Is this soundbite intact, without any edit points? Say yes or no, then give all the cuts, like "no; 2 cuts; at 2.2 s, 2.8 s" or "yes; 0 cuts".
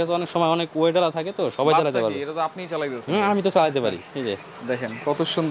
yes; 0 cuts